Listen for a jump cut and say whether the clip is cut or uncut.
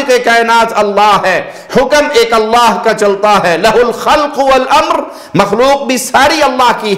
uncut